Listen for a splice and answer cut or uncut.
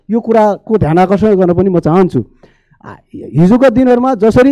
uncut